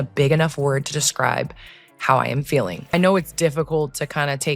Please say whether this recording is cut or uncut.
cut